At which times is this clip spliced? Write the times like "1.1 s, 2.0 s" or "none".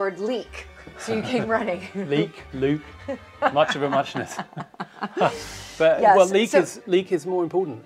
none